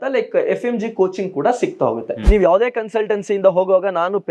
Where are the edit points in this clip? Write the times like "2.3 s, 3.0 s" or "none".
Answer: 2.1 s